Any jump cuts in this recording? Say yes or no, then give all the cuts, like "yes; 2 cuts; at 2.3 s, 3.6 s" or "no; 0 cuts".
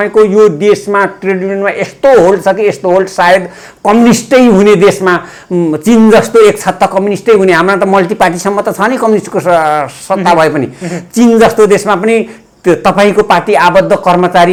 no; 0 cuts